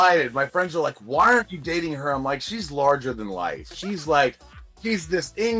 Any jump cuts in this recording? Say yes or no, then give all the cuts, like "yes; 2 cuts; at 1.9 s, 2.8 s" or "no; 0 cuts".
no; 0 cuts